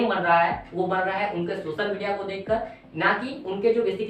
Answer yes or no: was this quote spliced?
no